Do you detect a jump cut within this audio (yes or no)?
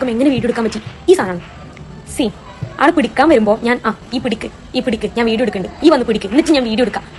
no